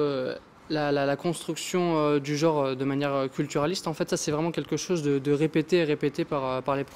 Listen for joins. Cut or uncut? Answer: uncut